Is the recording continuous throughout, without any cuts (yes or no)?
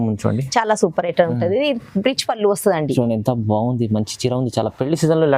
yes